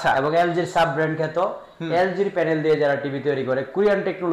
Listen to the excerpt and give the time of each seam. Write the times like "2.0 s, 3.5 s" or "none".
none